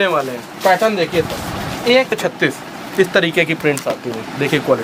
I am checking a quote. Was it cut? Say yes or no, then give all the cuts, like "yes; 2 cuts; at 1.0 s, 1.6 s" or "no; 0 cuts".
yes; 1 cut; at 2.1 s